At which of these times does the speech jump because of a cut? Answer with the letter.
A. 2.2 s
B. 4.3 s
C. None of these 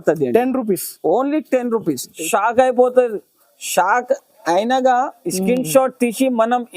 A